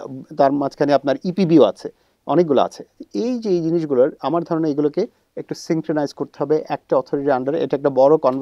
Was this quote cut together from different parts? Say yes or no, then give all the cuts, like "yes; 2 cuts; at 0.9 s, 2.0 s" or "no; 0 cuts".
no; 0 cuts